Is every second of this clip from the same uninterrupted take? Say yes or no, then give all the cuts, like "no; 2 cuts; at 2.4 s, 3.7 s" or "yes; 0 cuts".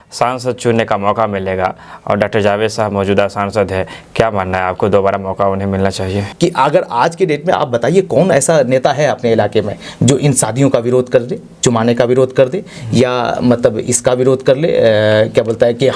no; 1 cut; at 6.3 s